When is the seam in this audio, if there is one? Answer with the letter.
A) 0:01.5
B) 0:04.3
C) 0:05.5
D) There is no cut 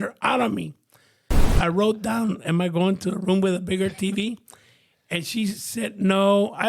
A